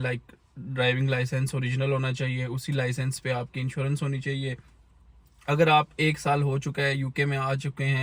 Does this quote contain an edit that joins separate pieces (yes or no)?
no